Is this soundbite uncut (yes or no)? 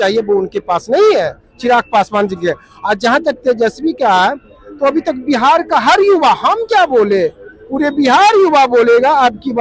yes